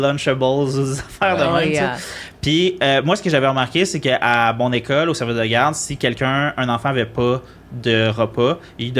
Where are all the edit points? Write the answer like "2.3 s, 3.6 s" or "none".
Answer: none